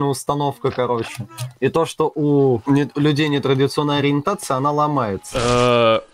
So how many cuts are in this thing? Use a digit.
2